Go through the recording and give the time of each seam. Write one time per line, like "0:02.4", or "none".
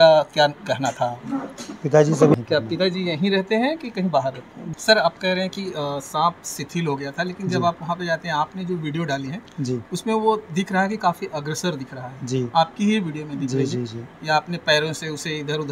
0:02.3
0:04.5